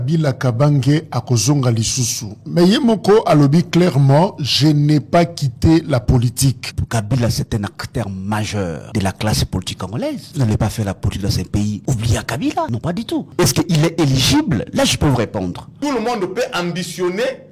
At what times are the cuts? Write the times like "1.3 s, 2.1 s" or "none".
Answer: 6.7 s, 8.8 s, 10.2 s, 11.8 s, 13.0 s, 15.7 s